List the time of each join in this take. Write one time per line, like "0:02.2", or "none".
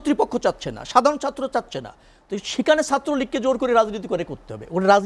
none